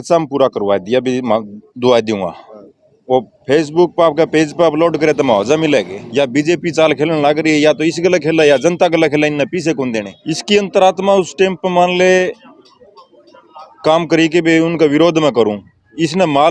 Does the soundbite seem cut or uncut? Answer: cut